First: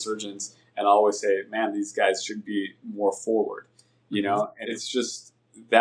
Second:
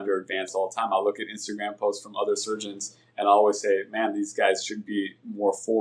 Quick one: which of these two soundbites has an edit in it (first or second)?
first